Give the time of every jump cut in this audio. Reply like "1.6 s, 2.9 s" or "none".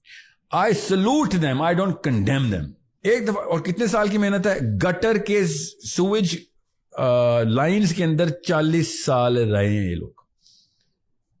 2.8 s

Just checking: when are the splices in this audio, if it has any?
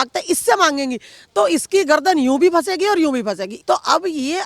3.5 s

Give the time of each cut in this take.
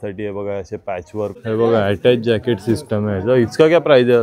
1.3 s

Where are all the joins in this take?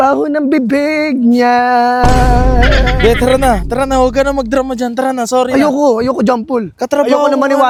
none

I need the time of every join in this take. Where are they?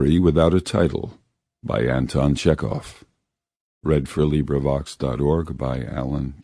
5.1 s

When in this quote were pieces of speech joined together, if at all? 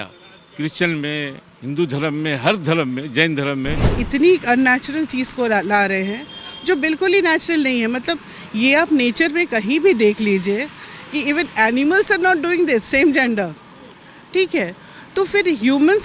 3.9 s

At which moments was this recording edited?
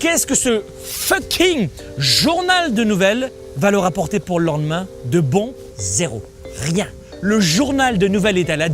3.4 s, 5.6 s, 7.0 s

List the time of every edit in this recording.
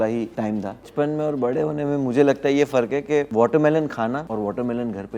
0.8 s, 3.3 s, 4.2 s

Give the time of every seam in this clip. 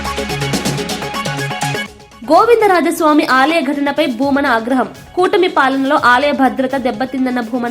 1.8 s

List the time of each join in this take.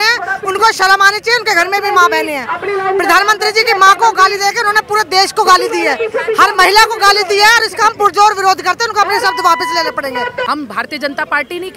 10.5 s

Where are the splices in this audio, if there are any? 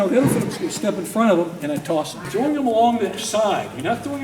2.2 s

